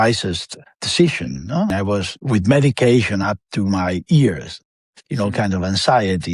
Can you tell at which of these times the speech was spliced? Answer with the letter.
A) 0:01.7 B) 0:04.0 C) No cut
A